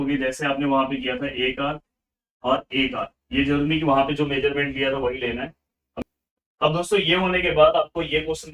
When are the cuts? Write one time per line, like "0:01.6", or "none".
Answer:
0:06.0